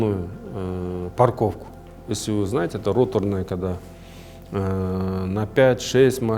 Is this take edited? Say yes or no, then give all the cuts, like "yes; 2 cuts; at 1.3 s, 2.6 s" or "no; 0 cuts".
no; 0 cuts